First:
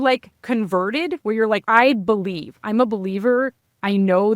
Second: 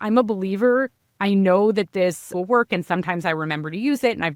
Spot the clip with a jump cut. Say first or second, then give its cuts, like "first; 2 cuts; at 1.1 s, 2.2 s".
first; 1 cut; at 1.6 s